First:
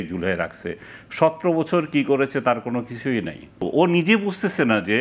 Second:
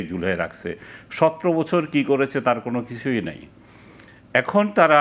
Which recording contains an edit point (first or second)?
first